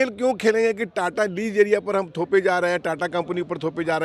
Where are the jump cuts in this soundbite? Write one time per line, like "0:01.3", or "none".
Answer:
none